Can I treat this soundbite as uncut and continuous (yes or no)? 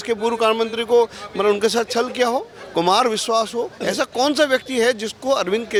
yes